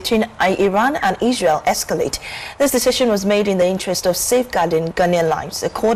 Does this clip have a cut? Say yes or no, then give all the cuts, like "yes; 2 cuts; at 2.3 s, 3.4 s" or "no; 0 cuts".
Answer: no; 0 cuts